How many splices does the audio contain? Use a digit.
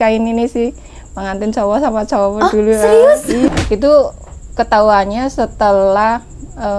1